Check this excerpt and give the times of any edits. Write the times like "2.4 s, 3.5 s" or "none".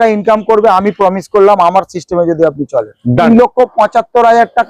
3.3 s